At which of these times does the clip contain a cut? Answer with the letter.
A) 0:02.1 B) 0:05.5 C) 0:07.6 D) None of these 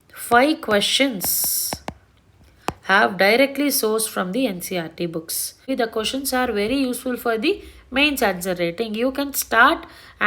B